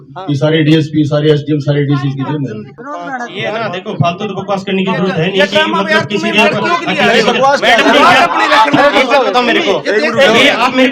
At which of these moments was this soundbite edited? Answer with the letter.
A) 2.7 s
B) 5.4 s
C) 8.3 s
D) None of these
A